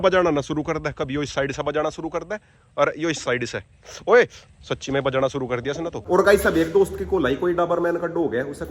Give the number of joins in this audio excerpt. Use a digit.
1